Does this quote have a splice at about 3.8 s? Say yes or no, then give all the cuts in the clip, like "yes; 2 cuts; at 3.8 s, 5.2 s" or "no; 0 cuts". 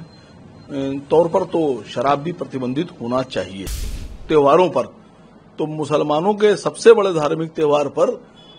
yes; 1 cut; at 3.8 s